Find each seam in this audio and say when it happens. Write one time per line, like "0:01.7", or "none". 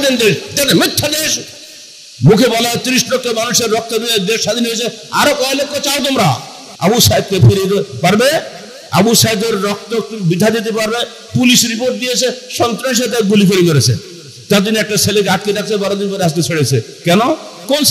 0:06.7